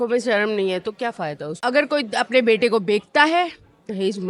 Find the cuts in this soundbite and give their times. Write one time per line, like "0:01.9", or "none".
0:01.6